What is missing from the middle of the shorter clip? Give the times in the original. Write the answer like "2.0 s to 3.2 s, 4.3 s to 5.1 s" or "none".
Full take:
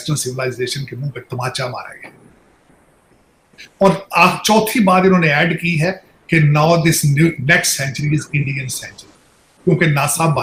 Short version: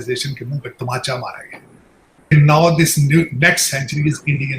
2.8 s to 6.4 s